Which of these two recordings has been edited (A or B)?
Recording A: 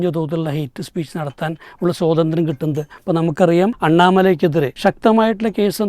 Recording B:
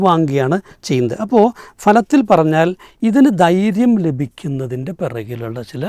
A